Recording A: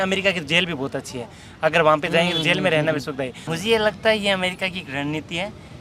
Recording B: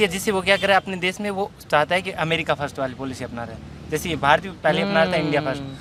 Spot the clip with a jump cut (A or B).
A